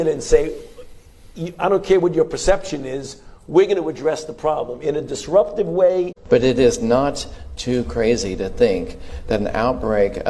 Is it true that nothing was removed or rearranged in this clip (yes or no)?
no